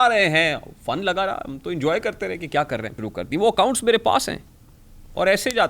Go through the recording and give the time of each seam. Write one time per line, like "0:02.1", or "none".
0:02.9